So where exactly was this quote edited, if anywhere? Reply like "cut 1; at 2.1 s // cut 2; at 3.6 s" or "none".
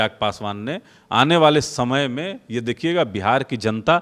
none

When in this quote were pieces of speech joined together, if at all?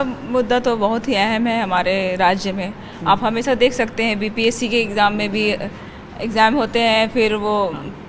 none

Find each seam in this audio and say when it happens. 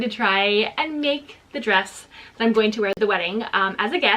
cut 1; at 2.9 s

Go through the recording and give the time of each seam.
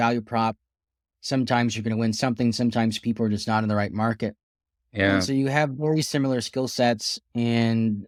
none

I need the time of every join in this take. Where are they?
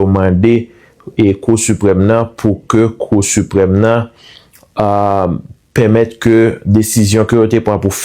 none

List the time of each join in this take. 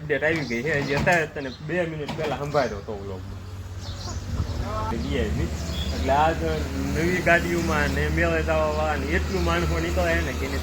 cut 1; at 4.9 s

